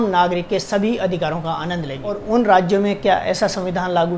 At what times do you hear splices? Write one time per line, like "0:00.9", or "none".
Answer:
0:02.1